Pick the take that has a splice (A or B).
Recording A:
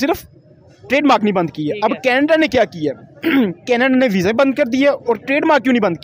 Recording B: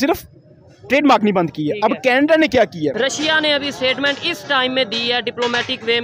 B